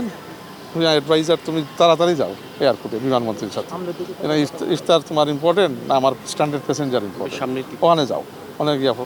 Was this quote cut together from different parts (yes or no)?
no